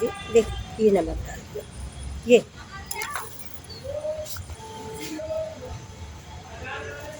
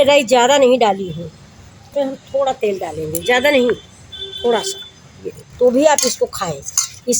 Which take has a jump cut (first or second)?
second